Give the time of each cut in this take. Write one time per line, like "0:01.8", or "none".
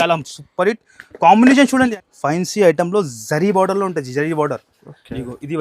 0:01.9